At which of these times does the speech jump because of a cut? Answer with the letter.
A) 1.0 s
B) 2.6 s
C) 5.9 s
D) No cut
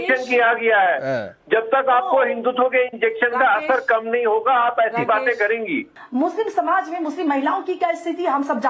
C